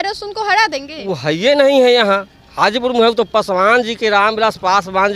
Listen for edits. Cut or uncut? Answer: uncut